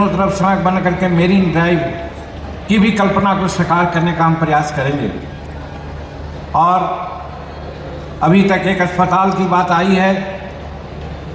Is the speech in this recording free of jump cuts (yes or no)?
yes